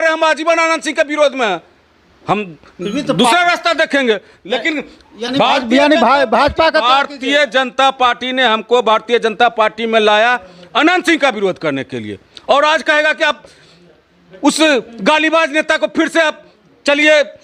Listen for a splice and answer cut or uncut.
uncut